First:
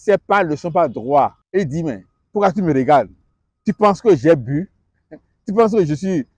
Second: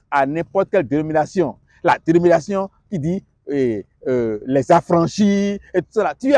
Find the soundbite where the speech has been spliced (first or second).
first